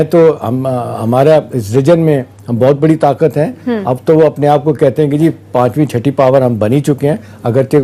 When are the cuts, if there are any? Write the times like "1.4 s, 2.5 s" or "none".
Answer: none